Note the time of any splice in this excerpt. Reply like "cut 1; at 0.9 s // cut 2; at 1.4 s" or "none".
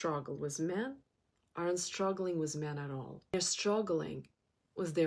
cut 1; at 3.3 s